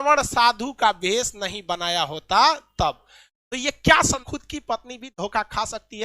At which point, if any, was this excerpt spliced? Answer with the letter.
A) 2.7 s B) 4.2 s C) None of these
B